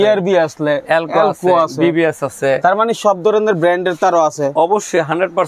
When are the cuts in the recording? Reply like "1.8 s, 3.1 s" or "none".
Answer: none